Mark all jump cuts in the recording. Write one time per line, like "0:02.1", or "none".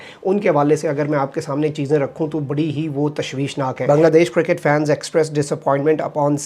0:03.8